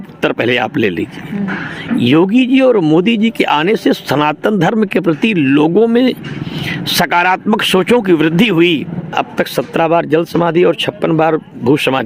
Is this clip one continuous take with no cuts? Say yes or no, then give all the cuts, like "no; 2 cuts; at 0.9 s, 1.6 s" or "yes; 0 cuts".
no; 1 cut; at 9.1 s